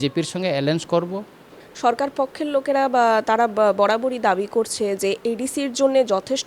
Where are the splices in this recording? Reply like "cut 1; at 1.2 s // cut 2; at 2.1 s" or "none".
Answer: cut 1; at 1.6 s